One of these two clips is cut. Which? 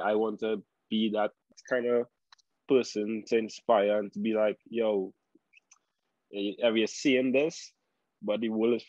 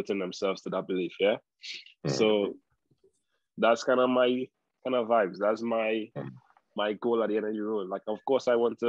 first; 1 cut; at 1.6 s

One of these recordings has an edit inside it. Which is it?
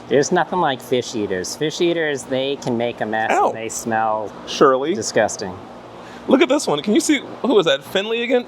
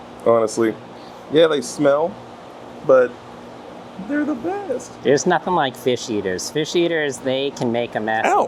first; 1 cut; at 6.0 s

